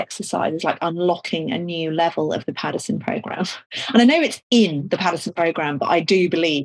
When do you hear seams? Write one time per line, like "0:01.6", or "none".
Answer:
none